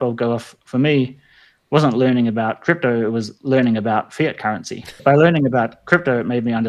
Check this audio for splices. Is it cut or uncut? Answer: cut